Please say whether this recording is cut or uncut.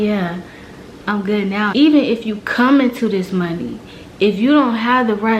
cut